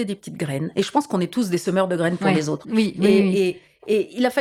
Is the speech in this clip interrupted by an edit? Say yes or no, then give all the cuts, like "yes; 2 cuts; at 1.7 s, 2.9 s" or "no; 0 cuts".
no; 0 cuts